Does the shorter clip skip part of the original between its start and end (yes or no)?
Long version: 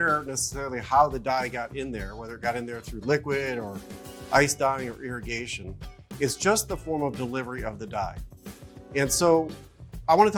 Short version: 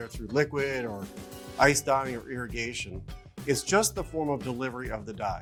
no